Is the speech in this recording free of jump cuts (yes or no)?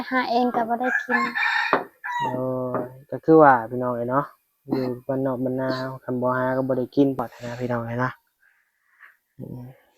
no